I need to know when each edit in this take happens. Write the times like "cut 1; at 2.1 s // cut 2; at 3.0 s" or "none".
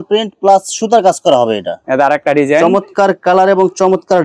cut 1; at 1.8 s